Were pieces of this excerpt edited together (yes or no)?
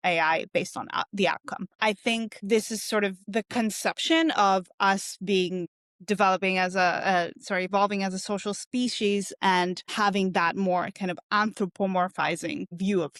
no